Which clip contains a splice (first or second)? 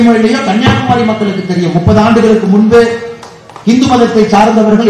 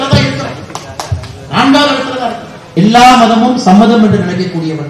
second